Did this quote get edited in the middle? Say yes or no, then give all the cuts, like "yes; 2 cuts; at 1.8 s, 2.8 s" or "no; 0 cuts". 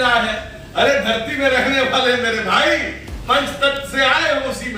no; 0 cuts